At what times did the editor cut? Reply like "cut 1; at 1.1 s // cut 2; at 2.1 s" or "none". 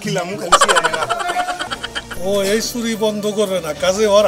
cut 1; at 1.7 s